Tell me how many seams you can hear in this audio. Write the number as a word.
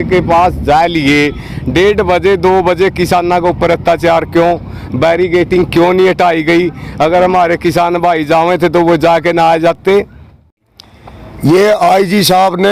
one